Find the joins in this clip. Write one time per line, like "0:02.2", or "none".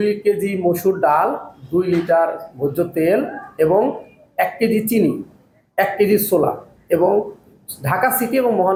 none

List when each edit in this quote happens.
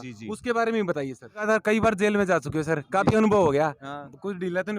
0:01.4

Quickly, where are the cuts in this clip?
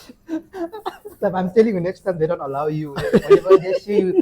0:01.2

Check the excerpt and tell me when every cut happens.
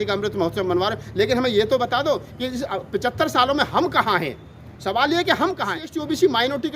0:05.8

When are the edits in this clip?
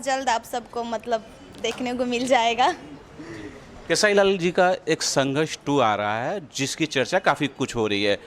none

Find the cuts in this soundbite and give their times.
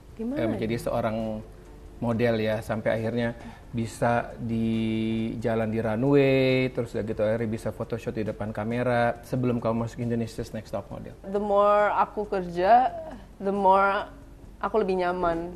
none

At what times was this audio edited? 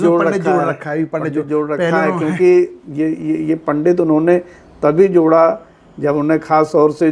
none

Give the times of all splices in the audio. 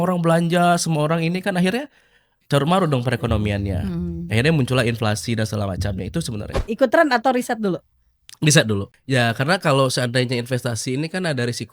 0:06.6
0:08.9

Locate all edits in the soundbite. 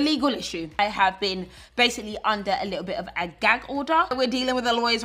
0:00.8
0:04.1

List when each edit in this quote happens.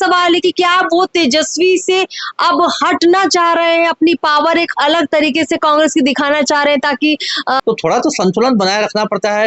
0:07.6

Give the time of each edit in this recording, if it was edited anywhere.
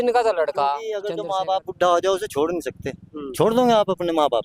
0:01.0

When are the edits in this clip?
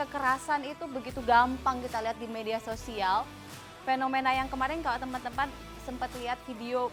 none

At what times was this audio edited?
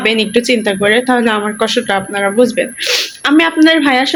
none

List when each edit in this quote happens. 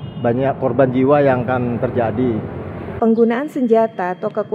0:02.8

